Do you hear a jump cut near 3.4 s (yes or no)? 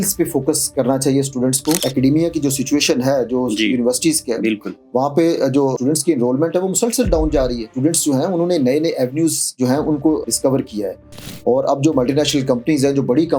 no